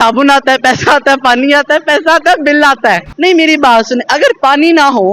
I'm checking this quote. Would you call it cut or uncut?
cut